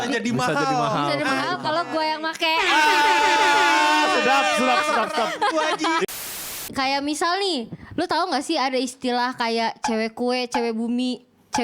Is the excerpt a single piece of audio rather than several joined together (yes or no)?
no